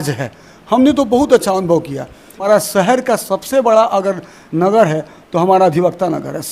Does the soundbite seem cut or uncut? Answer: cut